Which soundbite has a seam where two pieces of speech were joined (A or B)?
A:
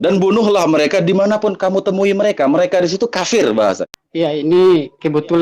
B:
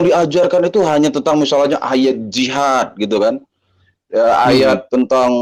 A